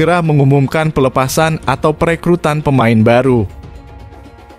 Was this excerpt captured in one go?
no; 1 cut; at 3.6 s

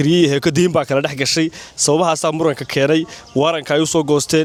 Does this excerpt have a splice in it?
no; 0 cuts

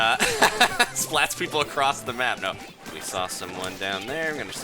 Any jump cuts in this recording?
yes; 1 cut; at 2.7 s

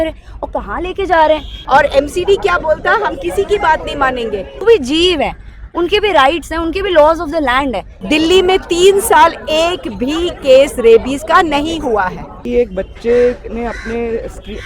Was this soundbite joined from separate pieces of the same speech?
yes; 4 cuts; at 1.5 s, 4.6 s, 7.9 s, 12.4 s

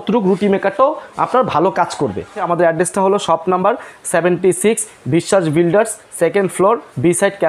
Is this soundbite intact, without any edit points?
no; 1 cut; at 2.5 s

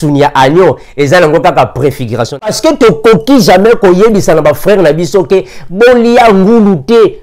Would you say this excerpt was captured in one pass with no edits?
no; 1 cut; at 2.4 s

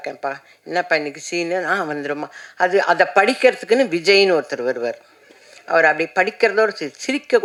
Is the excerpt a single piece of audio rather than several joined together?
yes; 0 cuts

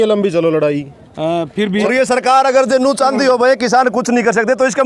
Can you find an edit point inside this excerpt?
yes; 1 cut; at 1.8 s

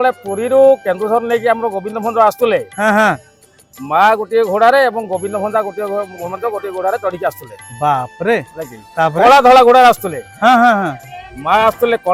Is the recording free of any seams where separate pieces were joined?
yes; 0 cuts

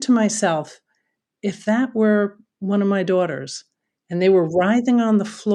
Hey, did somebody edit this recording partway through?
no; 0 cuts

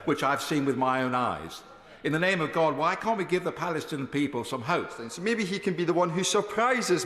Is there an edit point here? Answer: yes; 1 cut; at 5.1 s

